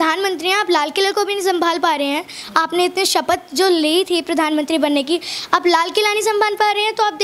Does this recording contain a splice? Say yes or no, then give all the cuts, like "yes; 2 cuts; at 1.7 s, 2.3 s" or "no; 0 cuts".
no; 0 cuts